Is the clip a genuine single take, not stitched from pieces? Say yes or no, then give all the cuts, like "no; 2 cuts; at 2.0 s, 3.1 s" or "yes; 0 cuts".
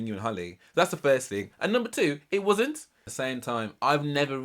no; 1 cut; at 3.1 s